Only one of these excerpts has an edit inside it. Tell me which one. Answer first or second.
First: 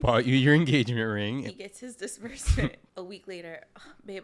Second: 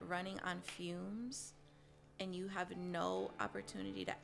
first